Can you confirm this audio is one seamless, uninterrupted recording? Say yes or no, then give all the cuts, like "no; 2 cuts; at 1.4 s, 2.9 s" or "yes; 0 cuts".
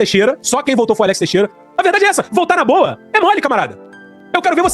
no; 1 cut; at 1.5 s